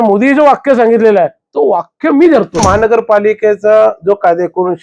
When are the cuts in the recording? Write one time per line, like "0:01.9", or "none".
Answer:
0:02.6